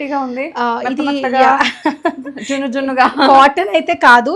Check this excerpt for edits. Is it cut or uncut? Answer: uncut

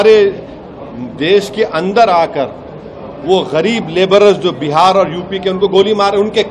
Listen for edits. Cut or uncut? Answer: uncut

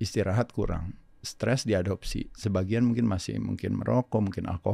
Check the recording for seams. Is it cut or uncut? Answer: uncut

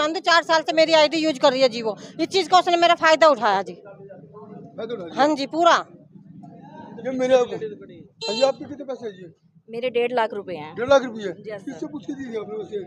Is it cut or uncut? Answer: uncut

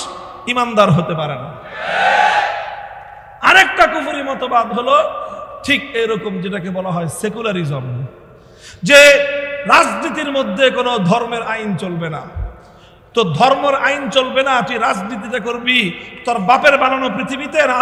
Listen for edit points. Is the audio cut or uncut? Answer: uncut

